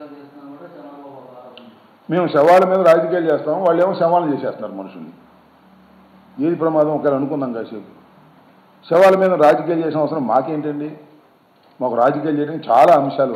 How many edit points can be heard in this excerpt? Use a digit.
1